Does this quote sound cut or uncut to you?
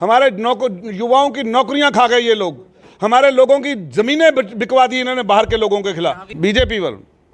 cut